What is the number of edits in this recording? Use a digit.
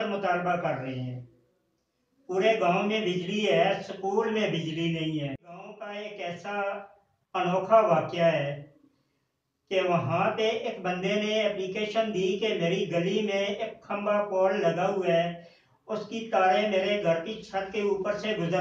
1